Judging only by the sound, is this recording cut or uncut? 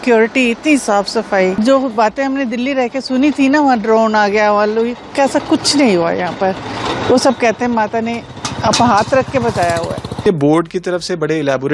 cut